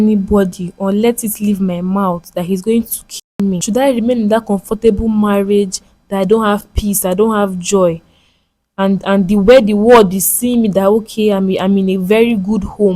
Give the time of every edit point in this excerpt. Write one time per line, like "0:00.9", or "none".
0:03.6

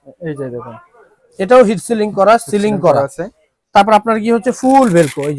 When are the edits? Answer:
none

